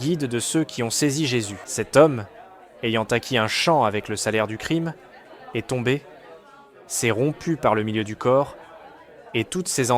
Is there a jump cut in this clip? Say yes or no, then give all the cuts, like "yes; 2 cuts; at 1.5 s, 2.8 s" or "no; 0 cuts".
yes; 1 cut; at 1.6 s